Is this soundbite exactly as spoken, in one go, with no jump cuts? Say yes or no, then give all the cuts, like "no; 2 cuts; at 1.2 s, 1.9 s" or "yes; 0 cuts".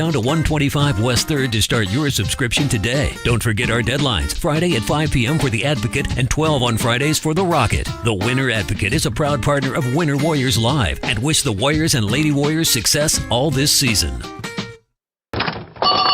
no; 1 cut; at 14.7 s